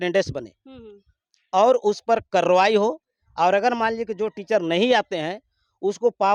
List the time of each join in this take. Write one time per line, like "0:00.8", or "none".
none